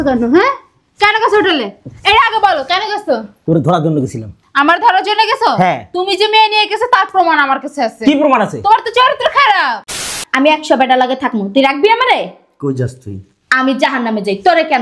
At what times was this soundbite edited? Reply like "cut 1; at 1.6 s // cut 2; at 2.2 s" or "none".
cut 1; at 10.0 s